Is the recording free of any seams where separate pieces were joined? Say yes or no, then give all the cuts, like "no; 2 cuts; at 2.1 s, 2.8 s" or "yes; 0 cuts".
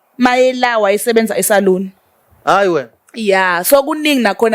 yes; 0 cuts